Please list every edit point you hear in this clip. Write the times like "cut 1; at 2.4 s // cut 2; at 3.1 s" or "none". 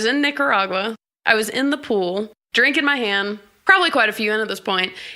cut 1; at 1.0 s // cut 2; at 2.4 s // cut 3; at 3.5 s